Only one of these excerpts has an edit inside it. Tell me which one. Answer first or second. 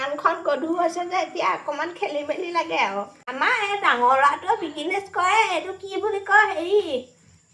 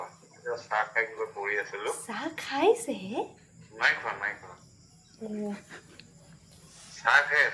first